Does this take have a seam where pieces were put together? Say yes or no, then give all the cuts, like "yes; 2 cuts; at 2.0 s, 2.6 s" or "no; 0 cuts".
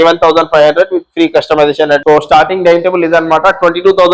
yes; 1 cut; at 2.0 s